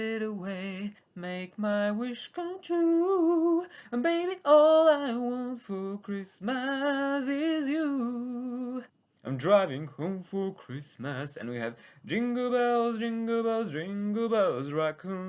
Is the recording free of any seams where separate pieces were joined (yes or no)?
no